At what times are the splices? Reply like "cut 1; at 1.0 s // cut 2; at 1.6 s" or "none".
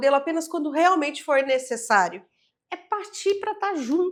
none

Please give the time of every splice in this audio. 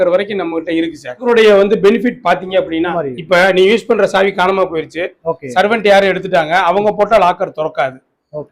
cut 1; at 1.2 s // cut 2; at 2.9 s

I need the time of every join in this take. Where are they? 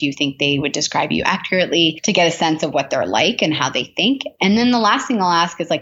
none

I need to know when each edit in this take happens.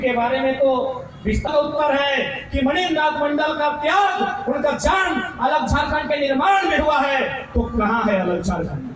cut 1; at 1.5 s

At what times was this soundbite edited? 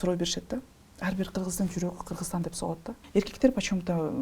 cut 1; at 2.9 s

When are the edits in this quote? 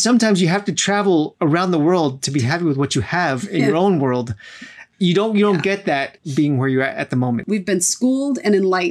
cut 1; at 1.3 s // cut 2; at 4.8 s // cut 3; at 6.2 s // cut 4; at 7.4 s

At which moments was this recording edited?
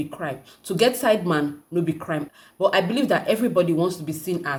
none

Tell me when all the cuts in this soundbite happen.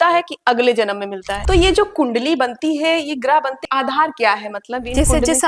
cut 1; at 1.3 s // cut 2; at 3.6 s

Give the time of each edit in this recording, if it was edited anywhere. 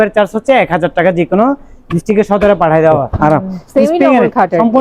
cut 1; at 3.1 s

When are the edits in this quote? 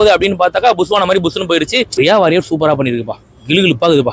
cut 1; at 1.9 s

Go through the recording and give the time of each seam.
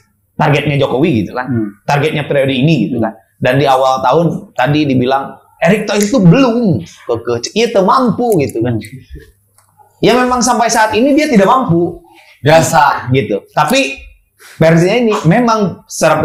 none

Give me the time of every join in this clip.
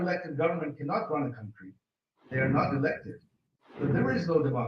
cut 1; at 2.3 s // cut 2; at 3.7 s

